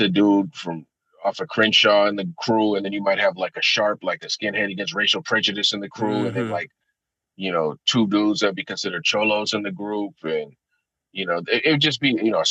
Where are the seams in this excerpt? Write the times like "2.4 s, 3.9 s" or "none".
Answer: none